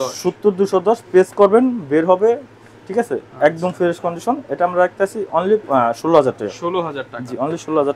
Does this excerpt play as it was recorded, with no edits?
yes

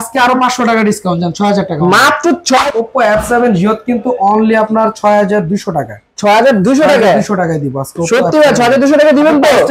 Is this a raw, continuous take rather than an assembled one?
no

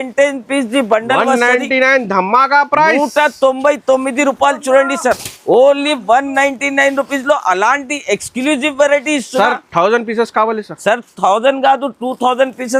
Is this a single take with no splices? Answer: yes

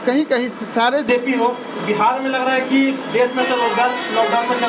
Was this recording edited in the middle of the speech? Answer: yes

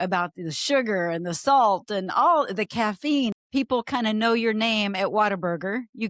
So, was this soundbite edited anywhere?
yes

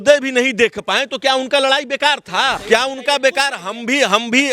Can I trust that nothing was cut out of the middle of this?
no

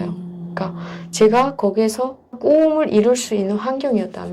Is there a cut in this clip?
yes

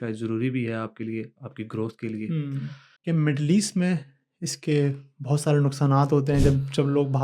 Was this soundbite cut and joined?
yes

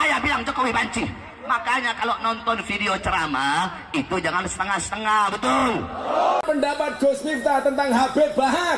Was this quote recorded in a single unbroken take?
no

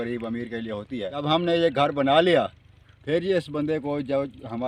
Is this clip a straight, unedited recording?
no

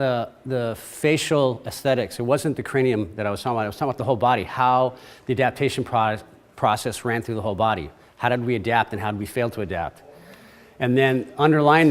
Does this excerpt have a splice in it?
yes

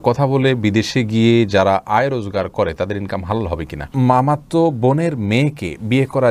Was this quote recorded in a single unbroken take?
no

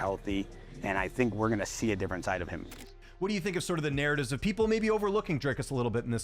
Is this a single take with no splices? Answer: no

